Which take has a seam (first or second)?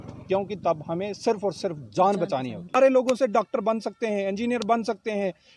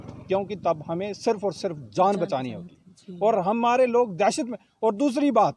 first